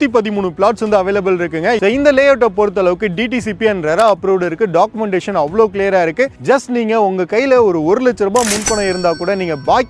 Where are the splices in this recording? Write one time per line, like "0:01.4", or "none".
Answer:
0:01.8